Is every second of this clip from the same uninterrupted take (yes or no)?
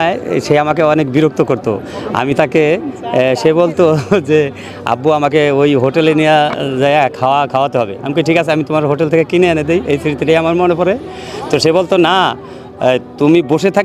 yes